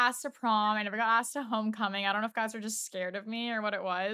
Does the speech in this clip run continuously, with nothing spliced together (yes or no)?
yes